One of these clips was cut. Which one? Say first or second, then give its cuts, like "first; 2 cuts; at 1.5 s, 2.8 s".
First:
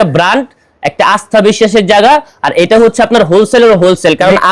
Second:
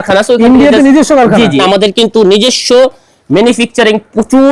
second; 1 cut; at 1.6 s